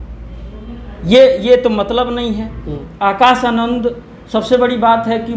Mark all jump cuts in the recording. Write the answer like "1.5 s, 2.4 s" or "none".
2.8 s

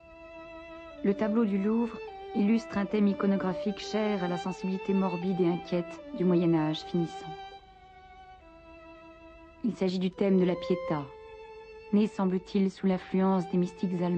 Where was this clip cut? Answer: none

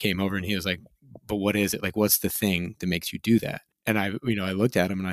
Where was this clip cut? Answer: none

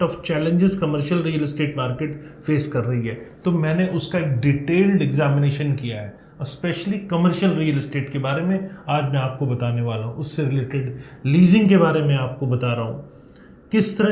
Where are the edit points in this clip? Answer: none

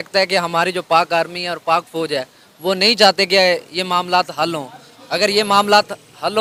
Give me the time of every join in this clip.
none

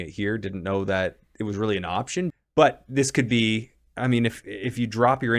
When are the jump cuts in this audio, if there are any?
2.3 s

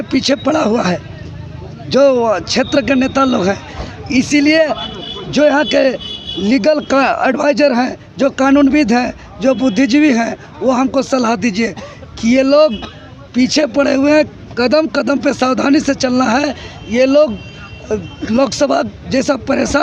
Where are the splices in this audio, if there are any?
none

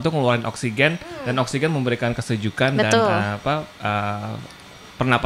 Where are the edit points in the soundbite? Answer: none

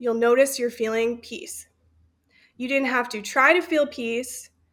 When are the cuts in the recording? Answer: none

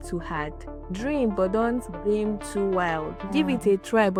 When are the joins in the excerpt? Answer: none

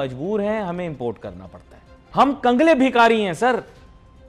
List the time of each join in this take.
2.0 s

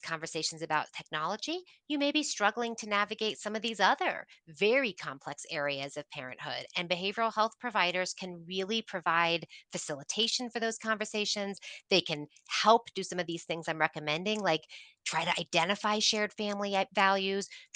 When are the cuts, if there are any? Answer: none

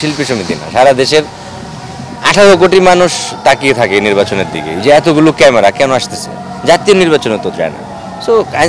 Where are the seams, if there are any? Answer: none

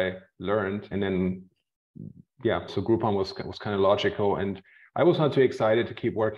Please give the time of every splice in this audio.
0.9 s, 2.7 s

